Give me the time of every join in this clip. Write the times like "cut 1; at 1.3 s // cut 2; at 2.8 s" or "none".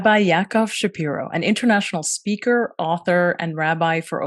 none